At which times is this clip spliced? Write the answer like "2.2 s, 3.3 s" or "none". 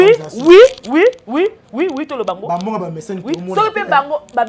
none